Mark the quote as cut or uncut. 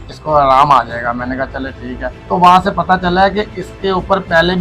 cut